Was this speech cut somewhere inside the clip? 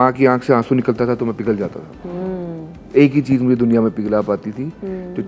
no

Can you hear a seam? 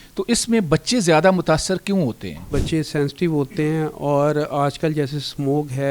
yes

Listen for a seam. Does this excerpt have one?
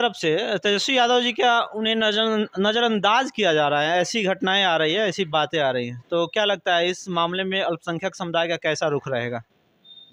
no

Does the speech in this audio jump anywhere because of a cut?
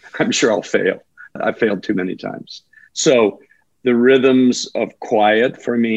yes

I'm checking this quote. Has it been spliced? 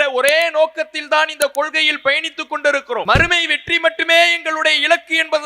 yes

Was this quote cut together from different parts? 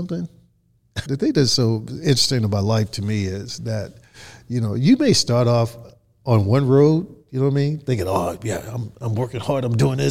yes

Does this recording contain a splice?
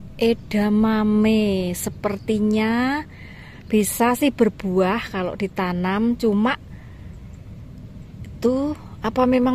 no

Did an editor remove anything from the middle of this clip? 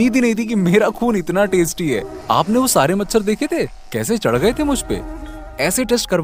no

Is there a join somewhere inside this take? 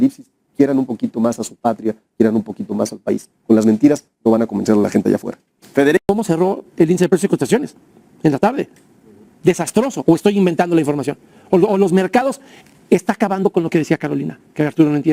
no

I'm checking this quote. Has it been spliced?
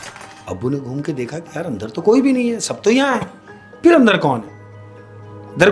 no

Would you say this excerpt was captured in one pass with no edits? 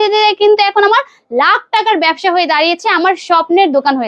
yes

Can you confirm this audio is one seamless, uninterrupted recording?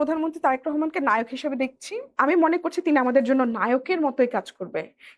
no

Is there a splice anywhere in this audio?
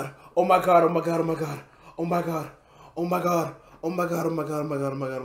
no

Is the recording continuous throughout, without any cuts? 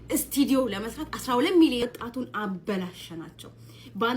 no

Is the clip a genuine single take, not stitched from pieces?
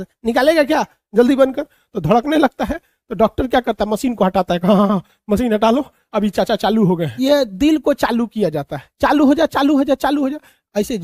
no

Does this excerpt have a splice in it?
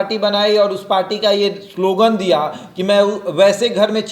no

